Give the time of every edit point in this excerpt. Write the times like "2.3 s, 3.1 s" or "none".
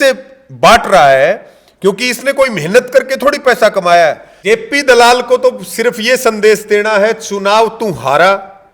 4.3 s